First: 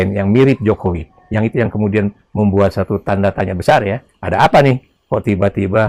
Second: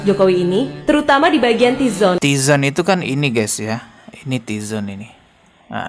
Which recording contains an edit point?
second; 1 cut; at 2.2 s

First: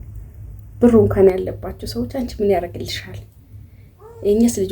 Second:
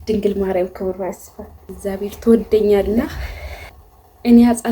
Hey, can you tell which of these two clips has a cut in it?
second; 1 cut; at 1.7 s

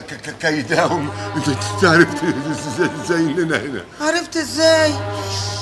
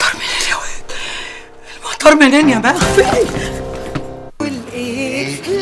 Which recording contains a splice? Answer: second; 1 cut; at 4.4 s

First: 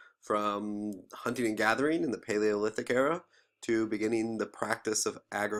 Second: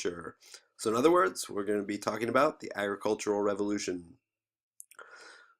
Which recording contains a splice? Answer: second; 1 cut; at 3.8 s

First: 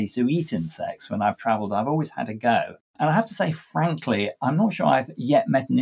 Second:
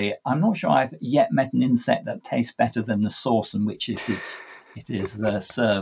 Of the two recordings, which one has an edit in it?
first; 1 cut; at 3.0 s

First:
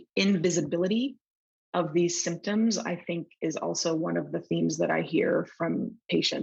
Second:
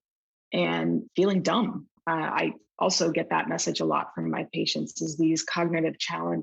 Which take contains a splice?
second; 1 cut; at 2.3 s

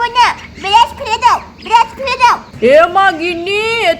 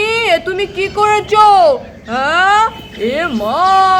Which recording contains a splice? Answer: first; 1 cut; at 2.5 s

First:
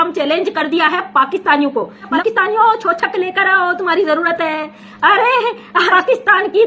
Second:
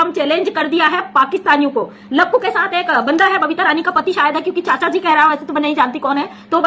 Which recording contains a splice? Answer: first; 2 cuts; at 2.2 s, 5.9 s

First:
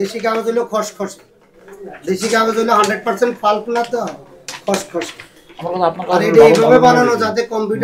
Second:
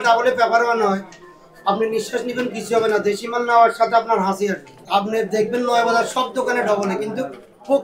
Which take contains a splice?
second; 1 cut; at 4.7 s

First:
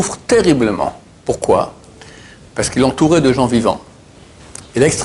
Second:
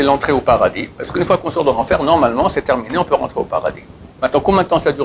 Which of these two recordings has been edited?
second; 1 cut; at 4.1 s

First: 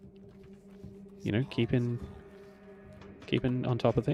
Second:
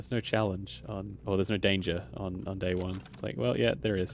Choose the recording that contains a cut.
second; 1 cut; at 1.1 s

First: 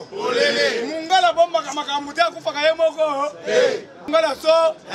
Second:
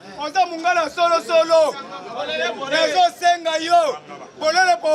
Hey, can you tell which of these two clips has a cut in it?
first; 1 cut; at 4.0 s

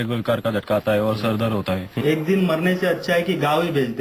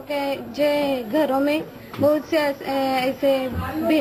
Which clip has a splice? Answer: first; 1 cut; at 2.0 s

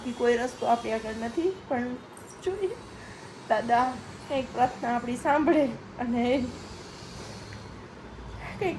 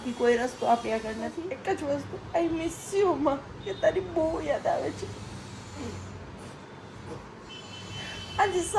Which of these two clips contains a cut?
second; 1 cut; at 1.3 s

